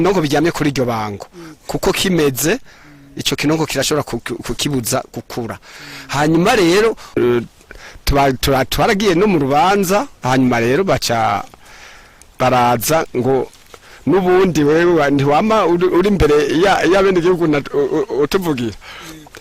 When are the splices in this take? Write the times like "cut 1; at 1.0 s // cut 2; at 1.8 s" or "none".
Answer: cut 1; at 7.2 s